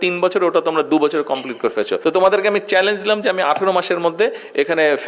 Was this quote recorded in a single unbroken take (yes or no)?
no